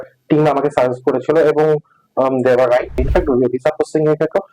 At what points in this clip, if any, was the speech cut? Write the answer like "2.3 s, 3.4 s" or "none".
3.0 s